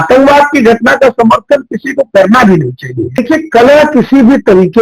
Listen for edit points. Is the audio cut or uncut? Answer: cut